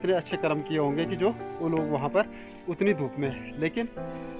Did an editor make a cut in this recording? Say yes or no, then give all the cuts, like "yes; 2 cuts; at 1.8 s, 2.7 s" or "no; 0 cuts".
no; 0 cuts